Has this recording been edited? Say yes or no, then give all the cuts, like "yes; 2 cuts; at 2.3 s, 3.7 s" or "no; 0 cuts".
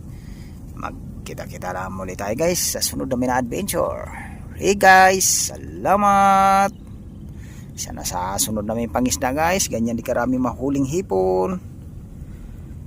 no; 0 cuts